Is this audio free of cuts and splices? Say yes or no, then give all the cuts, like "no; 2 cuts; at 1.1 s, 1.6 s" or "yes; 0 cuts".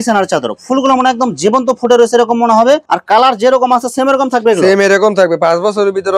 yes; 0 cuts